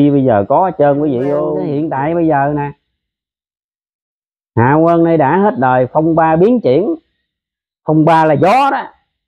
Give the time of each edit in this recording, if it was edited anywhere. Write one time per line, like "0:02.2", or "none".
0:01.6